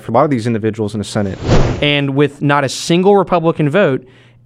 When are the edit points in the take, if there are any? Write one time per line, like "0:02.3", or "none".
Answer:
0:01.4